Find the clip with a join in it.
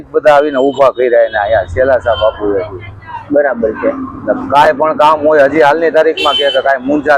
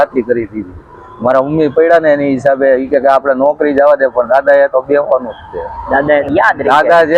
second; 1 cut; at 6.2 s

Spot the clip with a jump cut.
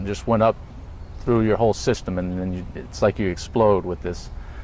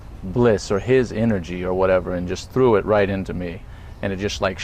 second; 1 cut; at 3.7 s

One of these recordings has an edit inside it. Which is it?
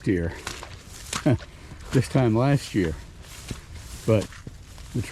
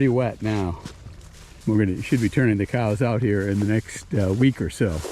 second; 1 cut; at 1.6 s

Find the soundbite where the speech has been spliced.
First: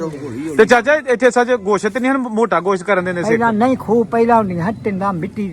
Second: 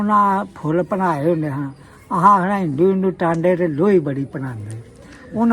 first; 1 cut; at 3.2 s

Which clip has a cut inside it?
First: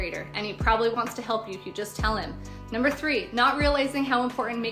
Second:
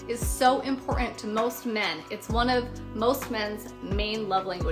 first; 1 cut; at 2.5 s

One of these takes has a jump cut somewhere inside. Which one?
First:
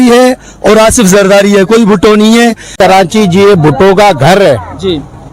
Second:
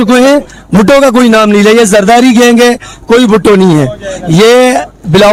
first; 1 cut; at 2.7 s

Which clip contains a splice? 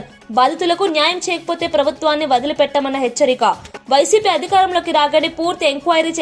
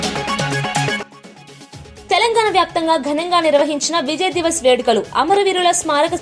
second; 1 cut; at 0.9 s

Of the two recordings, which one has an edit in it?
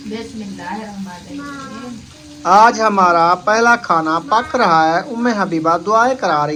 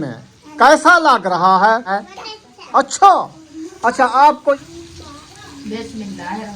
second; 2 cuts; at 1.9 s, 4.6 s

